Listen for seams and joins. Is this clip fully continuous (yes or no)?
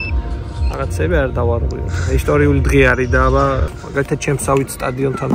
no